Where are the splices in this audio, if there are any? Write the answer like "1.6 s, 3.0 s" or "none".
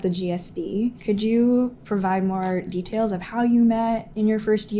1.0 s